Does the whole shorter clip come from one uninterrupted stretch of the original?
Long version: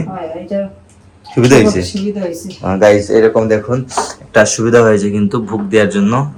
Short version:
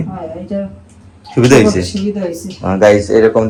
yes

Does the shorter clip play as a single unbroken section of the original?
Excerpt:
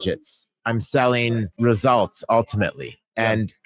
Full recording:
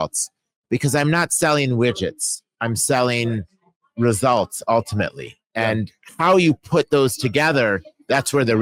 no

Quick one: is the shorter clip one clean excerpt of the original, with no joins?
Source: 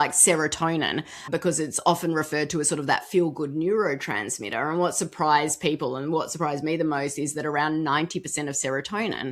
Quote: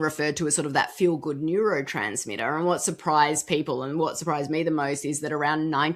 yes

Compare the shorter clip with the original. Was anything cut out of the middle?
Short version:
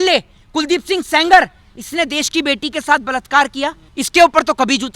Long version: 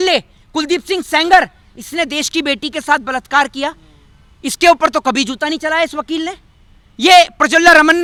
yes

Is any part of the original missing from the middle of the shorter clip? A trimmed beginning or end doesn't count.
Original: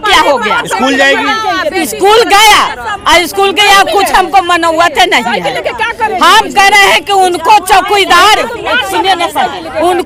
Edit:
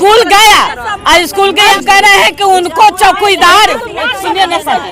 yes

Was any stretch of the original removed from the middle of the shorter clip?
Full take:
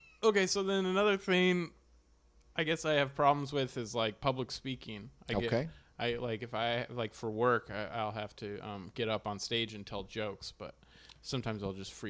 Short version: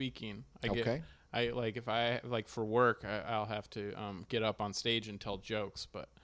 no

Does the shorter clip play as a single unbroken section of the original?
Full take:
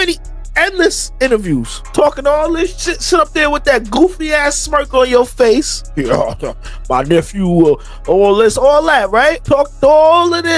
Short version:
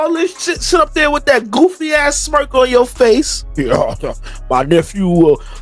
yes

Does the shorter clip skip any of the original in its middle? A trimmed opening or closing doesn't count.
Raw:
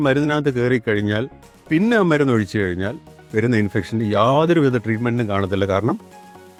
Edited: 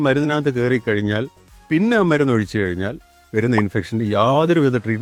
no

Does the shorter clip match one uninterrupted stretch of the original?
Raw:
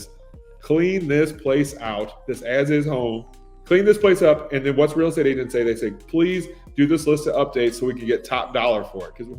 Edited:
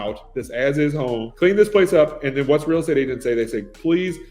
no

